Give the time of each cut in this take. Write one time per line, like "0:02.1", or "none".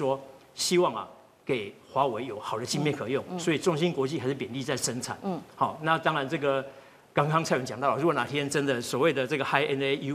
none

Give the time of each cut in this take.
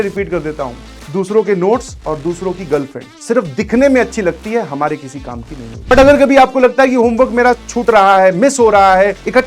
0:05.9

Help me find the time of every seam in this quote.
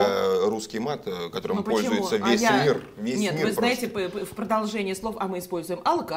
none

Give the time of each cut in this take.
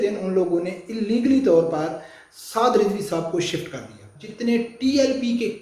0:04.2

